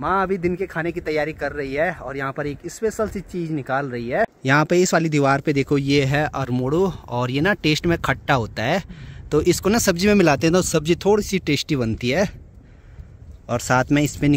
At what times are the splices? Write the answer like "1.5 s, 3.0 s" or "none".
none